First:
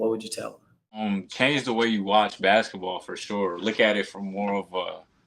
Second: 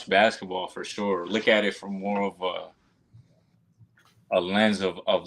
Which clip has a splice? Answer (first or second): first